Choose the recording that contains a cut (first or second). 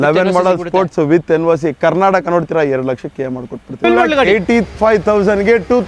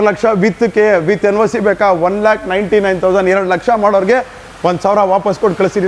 first